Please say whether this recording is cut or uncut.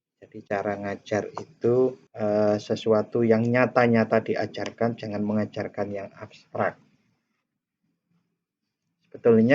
cut